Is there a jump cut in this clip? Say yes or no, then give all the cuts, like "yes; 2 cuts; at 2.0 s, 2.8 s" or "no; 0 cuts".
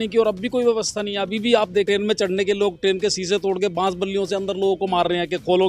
yes; 1 cut; at 1.8 s